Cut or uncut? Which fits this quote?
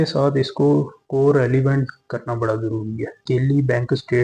cut